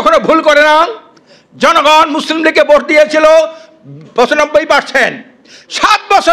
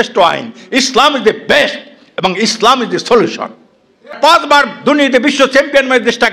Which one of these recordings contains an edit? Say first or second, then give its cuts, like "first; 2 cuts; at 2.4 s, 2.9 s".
second; 1 cut; at 4.2 s